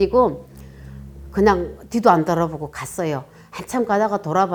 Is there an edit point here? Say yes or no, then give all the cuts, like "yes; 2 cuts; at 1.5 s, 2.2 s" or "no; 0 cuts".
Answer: no; 0 cuts